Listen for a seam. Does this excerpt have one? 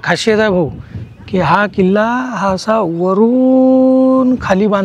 no; 0 cuts

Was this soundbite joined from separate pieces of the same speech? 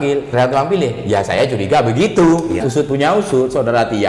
yes; 1 cut; at 2.6 s

